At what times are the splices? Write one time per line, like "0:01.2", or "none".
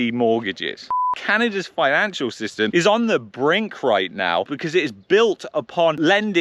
0:00.9
0:04.5